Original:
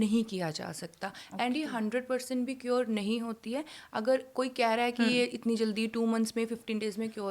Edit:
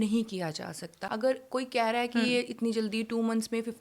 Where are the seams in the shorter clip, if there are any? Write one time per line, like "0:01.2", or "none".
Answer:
0:01.0